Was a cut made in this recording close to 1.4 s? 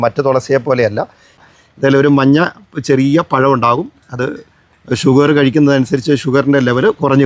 yes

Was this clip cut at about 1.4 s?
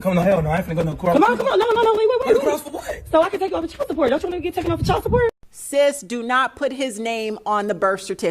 no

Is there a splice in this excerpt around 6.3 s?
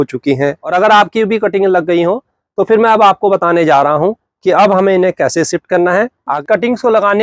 yes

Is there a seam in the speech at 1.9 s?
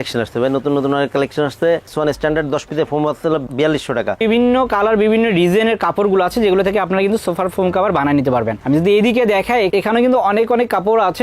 yes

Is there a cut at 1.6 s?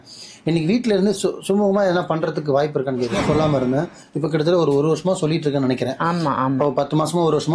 no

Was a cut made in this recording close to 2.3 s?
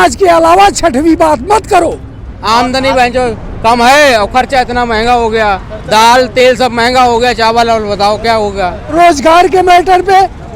yes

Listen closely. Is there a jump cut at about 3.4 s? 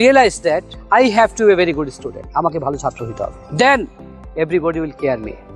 yes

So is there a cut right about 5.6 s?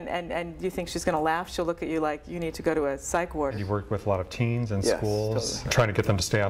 yes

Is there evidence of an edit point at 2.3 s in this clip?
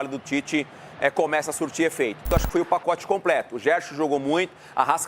yes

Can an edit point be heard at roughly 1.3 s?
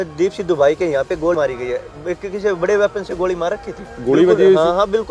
yes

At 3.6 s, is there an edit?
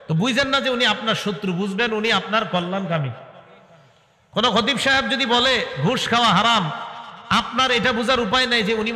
no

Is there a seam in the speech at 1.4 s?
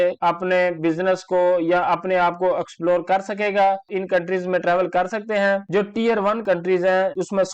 no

